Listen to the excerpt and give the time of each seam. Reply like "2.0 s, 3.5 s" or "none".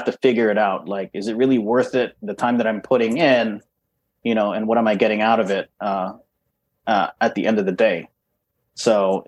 none